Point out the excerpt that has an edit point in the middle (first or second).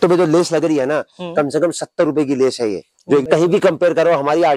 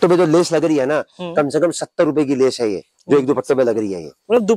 first